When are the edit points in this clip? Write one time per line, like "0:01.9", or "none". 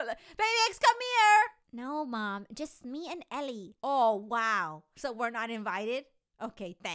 none